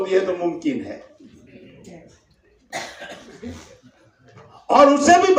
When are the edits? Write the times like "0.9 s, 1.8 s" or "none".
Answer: 3.8 s